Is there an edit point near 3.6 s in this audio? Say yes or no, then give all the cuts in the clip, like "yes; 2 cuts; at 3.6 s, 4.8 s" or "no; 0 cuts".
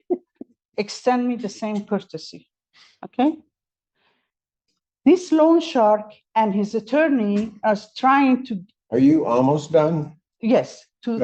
no; 0 cuts